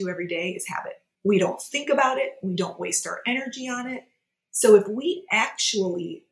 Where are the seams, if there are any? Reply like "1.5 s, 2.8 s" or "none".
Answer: 1.0 s